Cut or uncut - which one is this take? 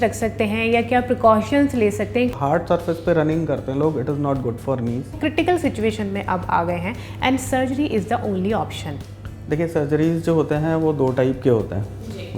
cut